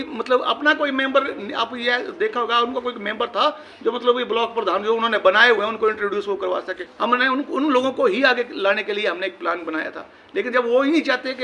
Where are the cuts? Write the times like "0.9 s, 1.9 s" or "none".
6.8 s